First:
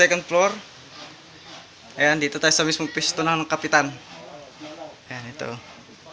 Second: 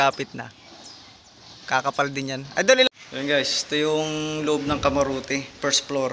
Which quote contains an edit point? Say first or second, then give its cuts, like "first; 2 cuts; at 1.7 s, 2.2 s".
second; 1 cut; at 2.9 s